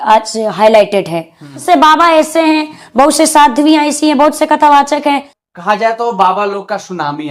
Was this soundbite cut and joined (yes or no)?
yes